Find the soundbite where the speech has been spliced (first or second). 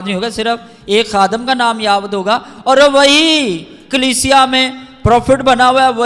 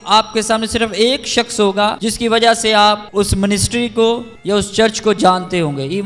second